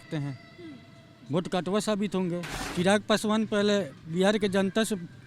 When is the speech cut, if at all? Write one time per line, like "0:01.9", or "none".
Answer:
0:02.6